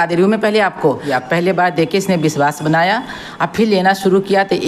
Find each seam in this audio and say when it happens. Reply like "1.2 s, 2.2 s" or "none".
1.0 s